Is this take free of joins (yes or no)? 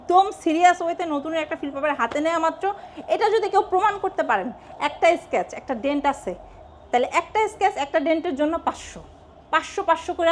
yes